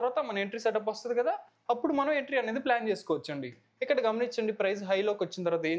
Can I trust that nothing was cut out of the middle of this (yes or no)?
yes